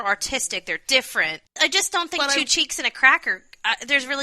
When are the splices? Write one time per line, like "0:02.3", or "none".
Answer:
0:01.6

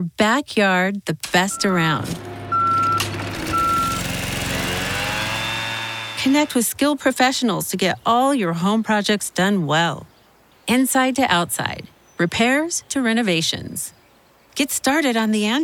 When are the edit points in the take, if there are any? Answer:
none

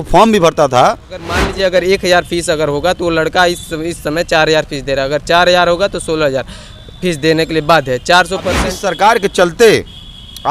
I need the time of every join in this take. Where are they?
0:01.4
0:08.7

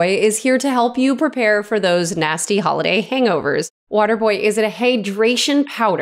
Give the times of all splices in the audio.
0:03.8

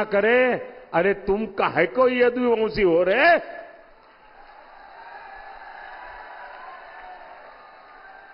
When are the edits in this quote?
none

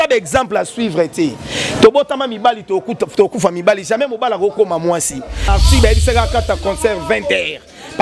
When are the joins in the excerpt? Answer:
0:05.4

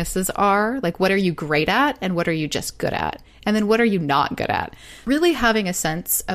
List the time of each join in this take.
0:04.9

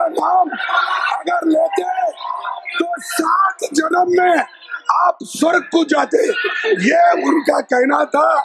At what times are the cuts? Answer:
none

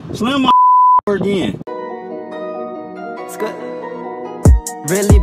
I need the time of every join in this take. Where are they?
0:01.6

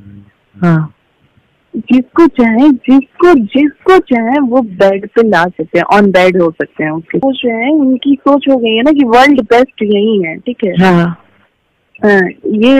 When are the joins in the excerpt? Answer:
0:07.2

